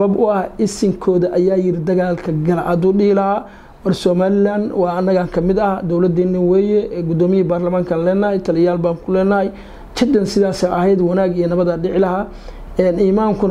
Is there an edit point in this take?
no; 0 cuts

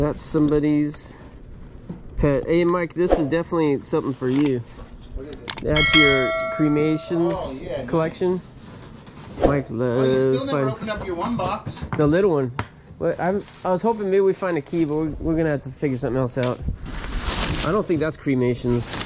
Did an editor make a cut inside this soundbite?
no; 0 cuts

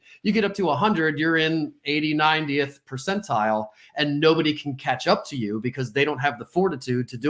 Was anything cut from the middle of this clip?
no; 0 cuts

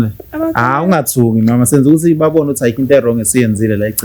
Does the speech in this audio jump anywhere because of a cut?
no; 0 cuts

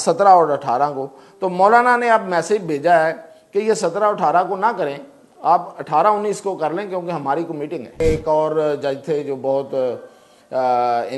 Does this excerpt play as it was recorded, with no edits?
no; 1 cut; at 8.0 s

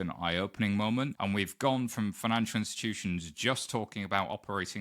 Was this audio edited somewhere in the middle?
yes; 1 cut; at 1.1 s

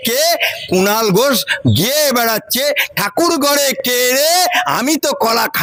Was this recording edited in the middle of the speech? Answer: no; 0 cuts

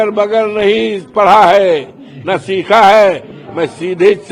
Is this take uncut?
yes; 0 cuts

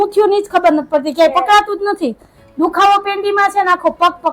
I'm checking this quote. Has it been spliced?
no; 0 cuts

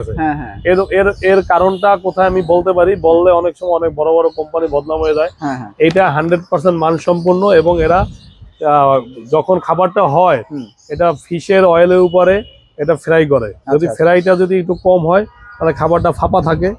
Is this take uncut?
yes; 0 cuts

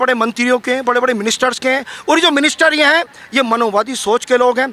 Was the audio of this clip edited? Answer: no; 0 cuts

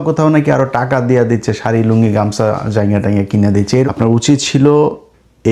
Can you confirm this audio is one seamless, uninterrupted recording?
no; 1 cut; at 3.9 s

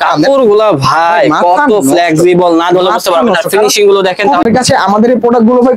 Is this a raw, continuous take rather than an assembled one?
no; 1 cut; at 4.4 s

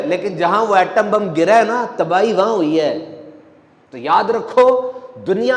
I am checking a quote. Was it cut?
no; 0 cuts

